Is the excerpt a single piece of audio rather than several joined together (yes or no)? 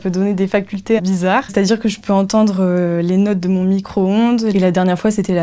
no